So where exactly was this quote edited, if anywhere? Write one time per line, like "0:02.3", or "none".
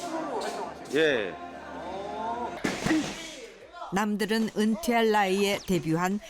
0:02.6

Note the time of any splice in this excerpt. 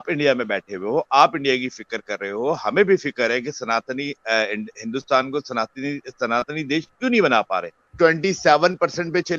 0:07.8

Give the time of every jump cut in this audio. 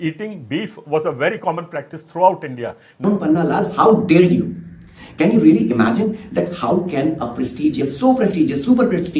0:03.0

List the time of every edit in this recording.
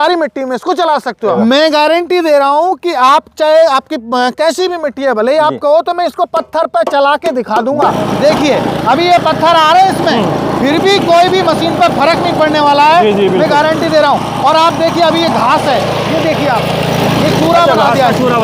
0:01.3
0:07.9

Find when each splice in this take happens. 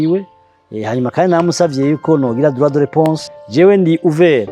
0:03.4

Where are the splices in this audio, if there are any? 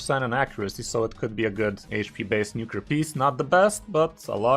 0:01.8

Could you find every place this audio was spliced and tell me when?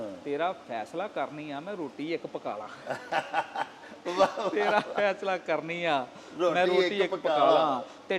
none

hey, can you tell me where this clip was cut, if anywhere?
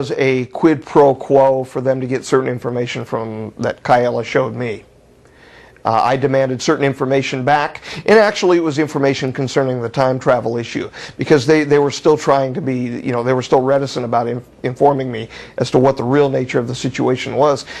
none

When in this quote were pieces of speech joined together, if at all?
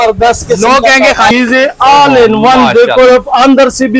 0:01.3

